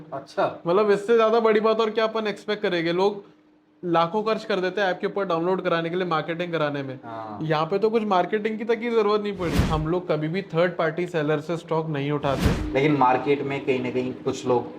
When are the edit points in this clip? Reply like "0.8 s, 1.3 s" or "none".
9.6 s, 12.5 s